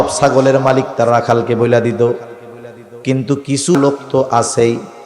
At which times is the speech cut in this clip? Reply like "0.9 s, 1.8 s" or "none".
3.8 s